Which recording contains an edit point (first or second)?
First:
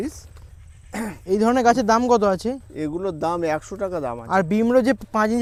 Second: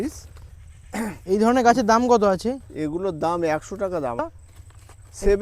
second